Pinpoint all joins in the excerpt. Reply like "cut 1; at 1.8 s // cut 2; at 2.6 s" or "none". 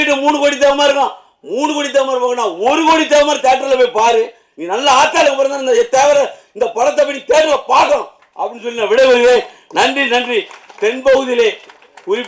none